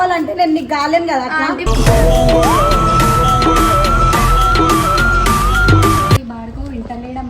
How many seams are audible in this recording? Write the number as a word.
one